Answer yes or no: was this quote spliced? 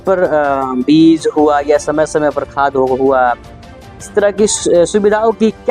no